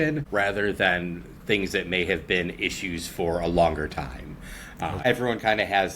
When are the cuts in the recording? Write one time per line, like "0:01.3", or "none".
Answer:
0:05.0